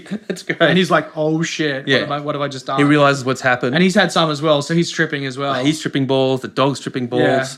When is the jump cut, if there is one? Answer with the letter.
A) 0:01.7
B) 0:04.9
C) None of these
C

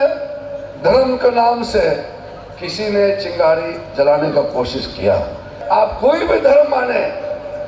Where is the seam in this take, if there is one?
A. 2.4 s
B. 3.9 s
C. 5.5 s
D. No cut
C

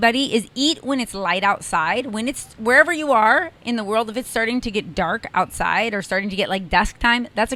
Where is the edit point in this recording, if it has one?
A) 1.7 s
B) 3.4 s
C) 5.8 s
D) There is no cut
D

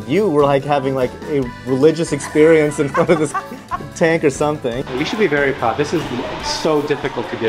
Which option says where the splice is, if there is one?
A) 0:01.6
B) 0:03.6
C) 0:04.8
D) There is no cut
C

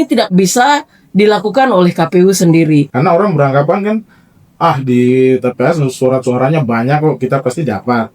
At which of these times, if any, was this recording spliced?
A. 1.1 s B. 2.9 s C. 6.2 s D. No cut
B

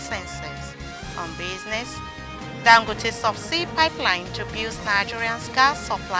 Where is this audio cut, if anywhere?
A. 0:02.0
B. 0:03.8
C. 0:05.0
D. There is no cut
D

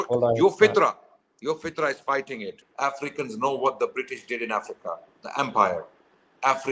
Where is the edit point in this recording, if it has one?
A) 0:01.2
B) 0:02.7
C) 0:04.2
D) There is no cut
B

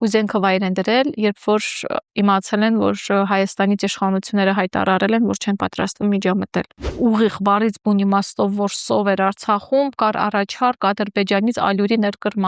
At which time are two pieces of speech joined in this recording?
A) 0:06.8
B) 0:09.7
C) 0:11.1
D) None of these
A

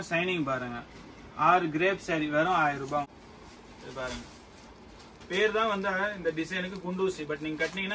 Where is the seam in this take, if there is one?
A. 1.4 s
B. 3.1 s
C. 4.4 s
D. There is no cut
B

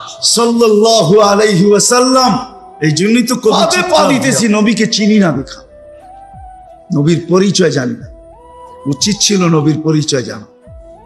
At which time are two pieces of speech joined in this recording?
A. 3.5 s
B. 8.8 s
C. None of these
A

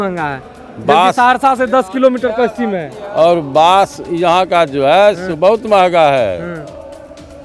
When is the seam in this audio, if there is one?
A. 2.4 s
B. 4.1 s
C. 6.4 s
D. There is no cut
D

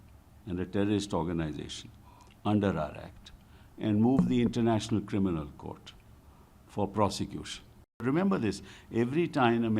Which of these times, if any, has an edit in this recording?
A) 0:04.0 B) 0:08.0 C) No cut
B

